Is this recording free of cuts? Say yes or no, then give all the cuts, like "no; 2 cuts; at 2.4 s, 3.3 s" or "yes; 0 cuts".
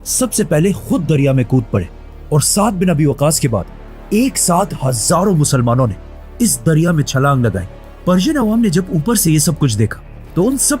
yes; 0 cuts